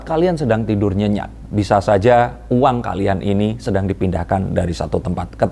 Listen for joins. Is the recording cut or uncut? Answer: uncut